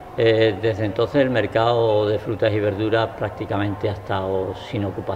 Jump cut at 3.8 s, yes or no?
no